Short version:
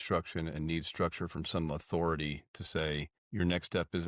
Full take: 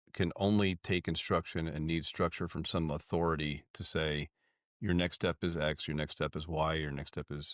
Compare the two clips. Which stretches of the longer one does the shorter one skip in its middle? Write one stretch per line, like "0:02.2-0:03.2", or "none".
0:04.4-0:04.7